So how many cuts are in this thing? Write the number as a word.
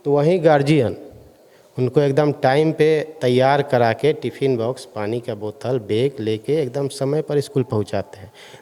zero